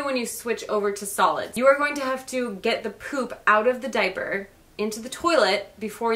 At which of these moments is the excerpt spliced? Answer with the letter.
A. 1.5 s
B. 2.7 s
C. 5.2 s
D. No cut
A